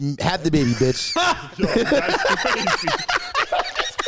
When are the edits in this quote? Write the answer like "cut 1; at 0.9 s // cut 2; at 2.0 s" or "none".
none

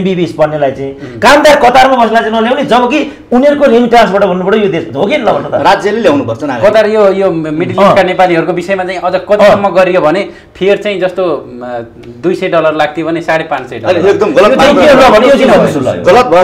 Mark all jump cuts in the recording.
none

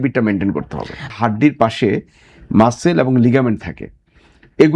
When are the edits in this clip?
cut 1; at 1.0 s

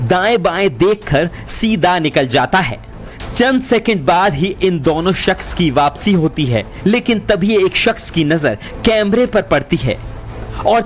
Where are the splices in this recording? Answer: none

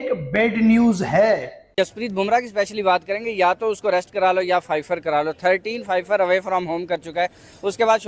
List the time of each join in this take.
cut 1; at 1.6 s

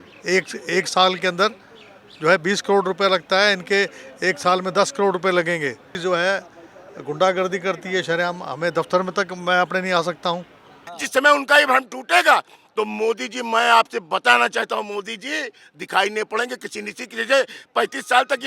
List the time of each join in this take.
cut 1; at 6.0 s // cut 2; at 10.9 s

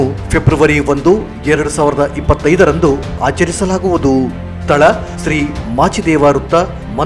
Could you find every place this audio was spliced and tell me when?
none

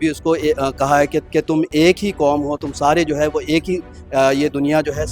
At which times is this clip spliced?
cut 1; at 1.2 s

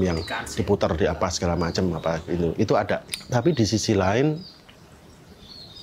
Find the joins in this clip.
cut 1; at 3.1 s

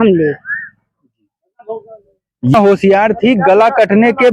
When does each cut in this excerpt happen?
cut 1; at 2.5 s

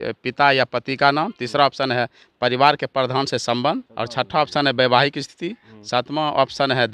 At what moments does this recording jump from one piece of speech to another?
cut 1; at 3.9 s

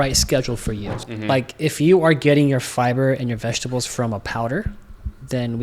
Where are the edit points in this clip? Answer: cut 1; at 0.9 s

